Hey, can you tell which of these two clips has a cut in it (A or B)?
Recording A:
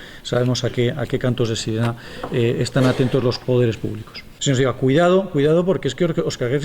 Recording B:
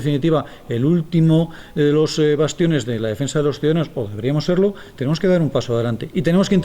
A